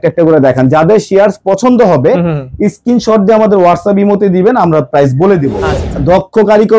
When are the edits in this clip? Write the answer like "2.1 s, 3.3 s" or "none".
5.9 s